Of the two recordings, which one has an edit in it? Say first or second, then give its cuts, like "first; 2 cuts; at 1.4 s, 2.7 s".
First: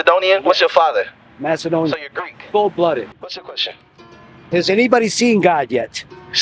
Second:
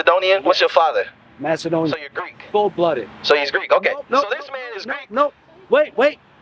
first; 1 cut; at 3.3 s